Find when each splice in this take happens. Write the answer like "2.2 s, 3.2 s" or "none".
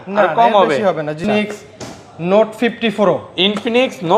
1.2 s

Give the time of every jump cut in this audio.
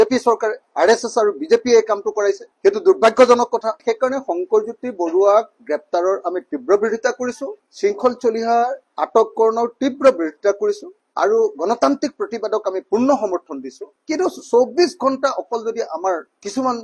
3.7 s, 7.6 s

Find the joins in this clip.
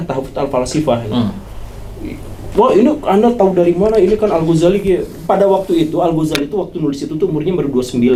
none

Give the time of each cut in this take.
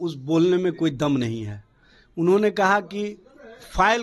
none

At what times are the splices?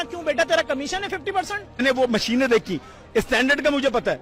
1.8 s

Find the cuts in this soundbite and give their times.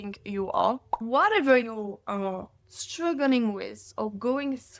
1.0 s

